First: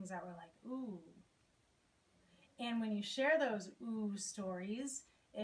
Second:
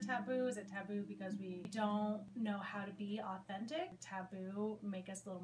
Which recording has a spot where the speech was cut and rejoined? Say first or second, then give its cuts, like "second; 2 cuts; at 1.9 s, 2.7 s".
second; 3 cuts; at 1.7 s, 2.3 s, 3.9 s